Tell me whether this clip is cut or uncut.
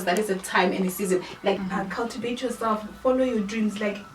cut